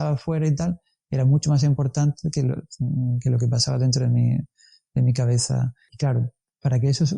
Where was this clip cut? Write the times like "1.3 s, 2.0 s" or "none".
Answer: 5.9 s